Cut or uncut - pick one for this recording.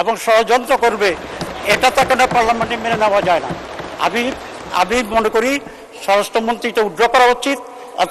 uncut